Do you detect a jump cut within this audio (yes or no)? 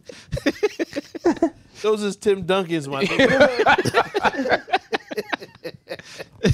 no